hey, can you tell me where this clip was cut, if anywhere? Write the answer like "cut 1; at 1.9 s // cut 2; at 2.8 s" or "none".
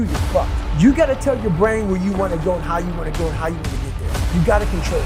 none